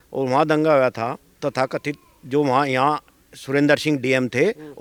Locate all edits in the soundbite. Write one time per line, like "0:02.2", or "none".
none